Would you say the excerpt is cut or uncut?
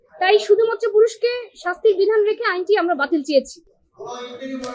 uncut